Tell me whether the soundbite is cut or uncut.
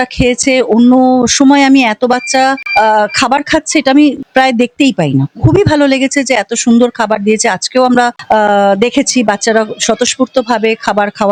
uncut